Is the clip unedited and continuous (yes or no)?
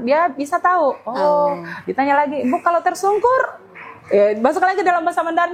yes